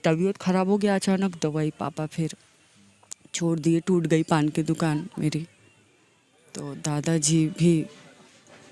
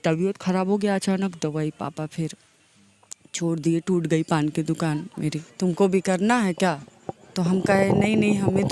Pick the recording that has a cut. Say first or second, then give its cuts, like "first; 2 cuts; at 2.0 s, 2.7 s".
second; 1 cut; at 5.4 s